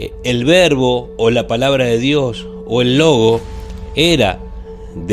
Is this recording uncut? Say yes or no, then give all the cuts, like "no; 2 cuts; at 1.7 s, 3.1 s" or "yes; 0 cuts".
yes; 0 cuts